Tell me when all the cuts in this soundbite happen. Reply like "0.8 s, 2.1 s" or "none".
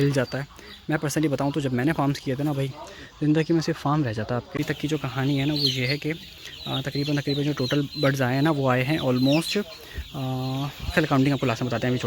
4.5 s